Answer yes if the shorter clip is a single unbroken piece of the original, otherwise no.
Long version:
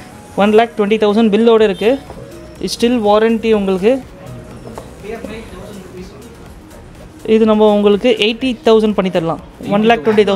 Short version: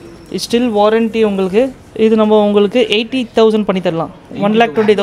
no